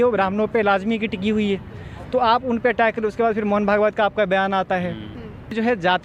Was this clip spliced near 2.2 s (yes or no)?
no